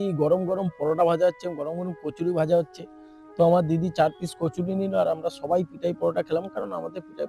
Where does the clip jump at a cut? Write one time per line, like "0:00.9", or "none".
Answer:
none